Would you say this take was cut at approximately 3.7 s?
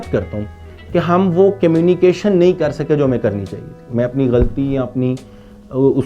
no; 0 cuts

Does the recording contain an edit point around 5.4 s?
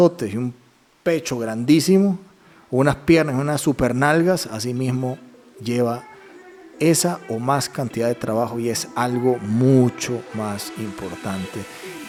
no; 0 cuts

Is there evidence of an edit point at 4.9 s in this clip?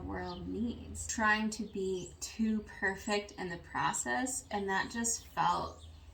no; 1 cut; at 1.1 s

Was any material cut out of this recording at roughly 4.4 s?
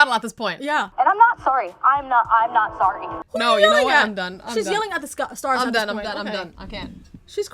no; 2 cuts; at 0.9 s, 3.1 s

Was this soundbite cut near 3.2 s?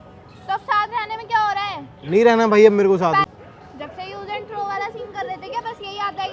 yes; 1 cut; at 3.2 s

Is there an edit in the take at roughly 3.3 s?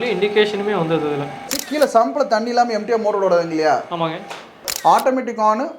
no; 2 cuts; at 1.6 s, 4.7 s

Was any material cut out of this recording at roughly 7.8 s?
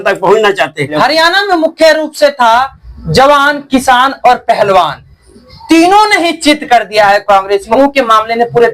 yes; 2 cuts; at 1.0 s, 7.8 s

